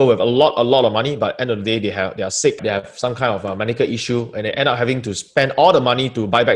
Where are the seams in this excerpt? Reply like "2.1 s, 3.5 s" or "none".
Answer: 2.6 s